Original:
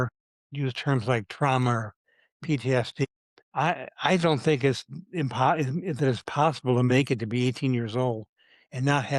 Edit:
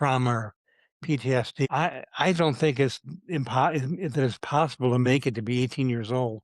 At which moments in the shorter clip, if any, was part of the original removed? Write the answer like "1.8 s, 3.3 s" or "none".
1.7 s